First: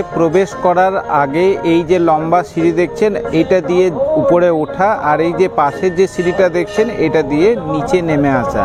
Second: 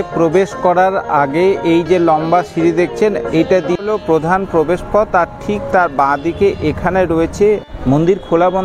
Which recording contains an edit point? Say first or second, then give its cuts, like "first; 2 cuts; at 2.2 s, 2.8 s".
second; 2 cuts; at 3.7 s, 7.7 s